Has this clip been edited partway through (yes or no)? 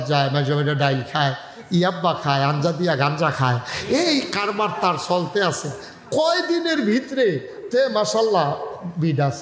no